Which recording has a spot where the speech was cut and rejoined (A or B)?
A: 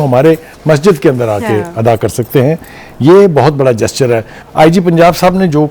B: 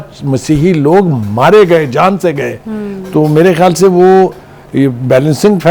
A